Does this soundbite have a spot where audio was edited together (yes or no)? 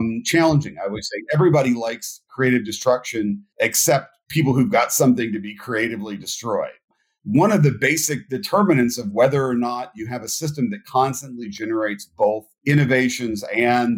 yes